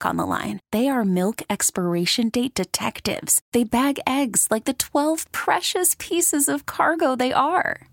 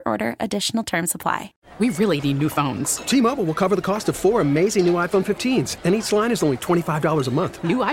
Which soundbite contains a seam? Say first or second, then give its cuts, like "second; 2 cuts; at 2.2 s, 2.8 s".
second; 1 cut; at 1.6 s